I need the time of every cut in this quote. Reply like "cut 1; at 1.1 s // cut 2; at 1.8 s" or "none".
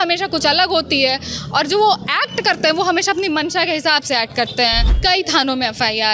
cut 1; at 4.9 s